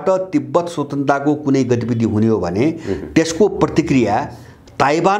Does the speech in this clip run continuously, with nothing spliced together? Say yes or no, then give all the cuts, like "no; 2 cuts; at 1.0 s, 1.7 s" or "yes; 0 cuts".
yes; 0 cuts